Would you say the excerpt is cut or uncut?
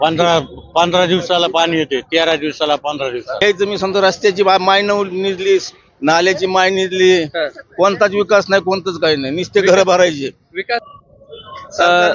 cut